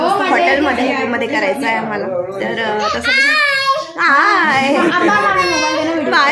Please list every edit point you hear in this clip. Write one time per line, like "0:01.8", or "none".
none